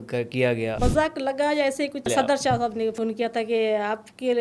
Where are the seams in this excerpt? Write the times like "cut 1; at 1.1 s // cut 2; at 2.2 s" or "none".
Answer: cut 1; at 0.8 s // cut 2; at 2.1 s // cut 3; at 2.9 s